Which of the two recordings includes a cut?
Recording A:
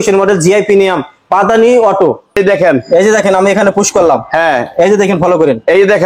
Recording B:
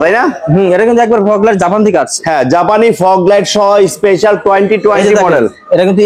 A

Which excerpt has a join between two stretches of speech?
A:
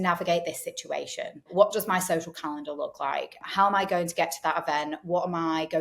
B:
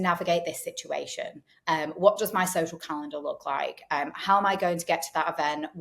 A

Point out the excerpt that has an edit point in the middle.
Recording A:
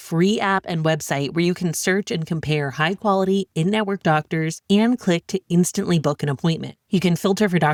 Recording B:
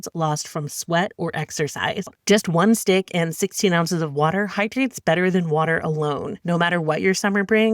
B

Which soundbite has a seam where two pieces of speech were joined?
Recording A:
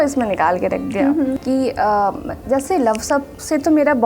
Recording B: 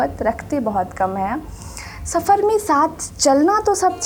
A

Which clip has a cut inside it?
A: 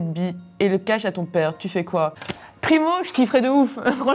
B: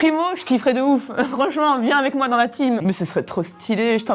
B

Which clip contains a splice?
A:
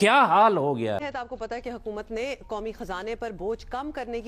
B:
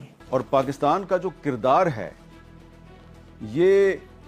A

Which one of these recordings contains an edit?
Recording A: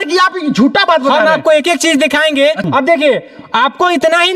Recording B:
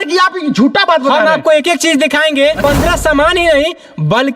B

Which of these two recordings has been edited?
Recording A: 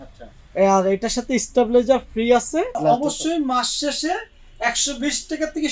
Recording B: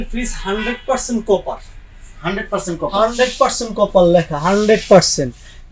A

